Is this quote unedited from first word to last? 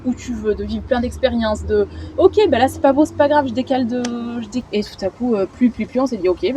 no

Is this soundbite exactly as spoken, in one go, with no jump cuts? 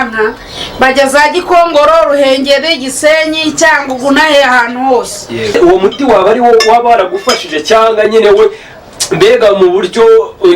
no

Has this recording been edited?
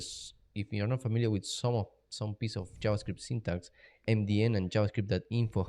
yes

